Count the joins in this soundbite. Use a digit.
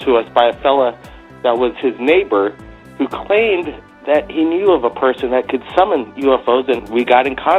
0